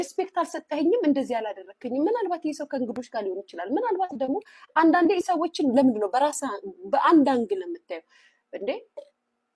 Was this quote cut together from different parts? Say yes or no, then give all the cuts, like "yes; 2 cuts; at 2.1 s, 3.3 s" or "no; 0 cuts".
no; 0 cuts